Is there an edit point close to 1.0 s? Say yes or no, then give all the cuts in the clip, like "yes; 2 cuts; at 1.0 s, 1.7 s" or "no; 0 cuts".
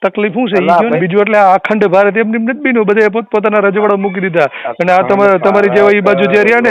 yes; 1 cut; at 1.0 s